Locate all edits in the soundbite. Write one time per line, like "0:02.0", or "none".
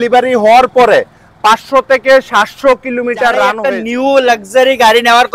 0:03.6